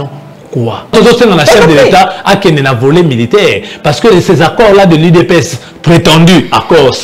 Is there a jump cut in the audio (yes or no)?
yes